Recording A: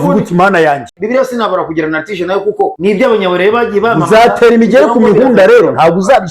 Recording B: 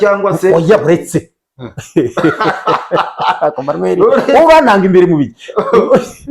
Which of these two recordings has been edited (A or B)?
A